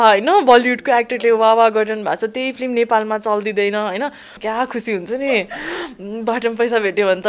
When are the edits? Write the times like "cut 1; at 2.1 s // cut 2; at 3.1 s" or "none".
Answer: cut 1; at 4.3 s